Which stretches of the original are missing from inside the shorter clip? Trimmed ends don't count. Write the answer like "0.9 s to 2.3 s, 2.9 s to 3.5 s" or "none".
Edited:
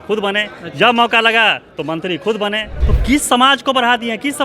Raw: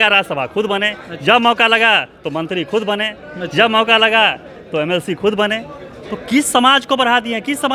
3.2 s to 6.0 s